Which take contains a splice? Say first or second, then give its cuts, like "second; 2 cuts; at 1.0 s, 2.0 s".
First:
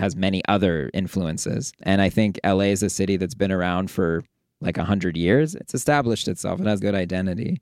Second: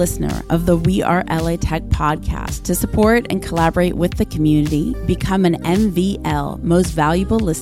first; 2 cuts; at 5.5 s, 6.8 s